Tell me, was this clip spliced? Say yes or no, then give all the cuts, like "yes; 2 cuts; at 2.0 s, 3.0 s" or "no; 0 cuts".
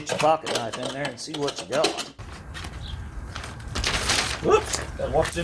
yes; 1 cut; at 2.4 s